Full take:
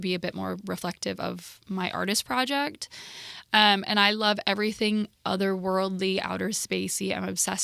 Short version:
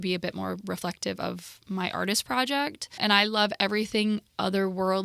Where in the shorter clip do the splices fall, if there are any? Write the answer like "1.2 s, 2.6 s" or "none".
3.0 s